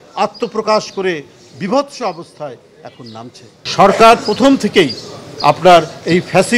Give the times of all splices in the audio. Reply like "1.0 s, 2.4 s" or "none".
3.6 s